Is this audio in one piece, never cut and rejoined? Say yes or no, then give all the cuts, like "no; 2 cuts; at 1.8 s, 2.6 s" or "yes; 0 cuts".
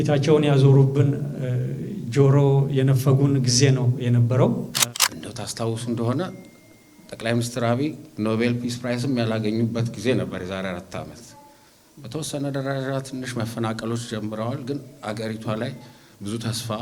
no; 1 cut; at 4.7 s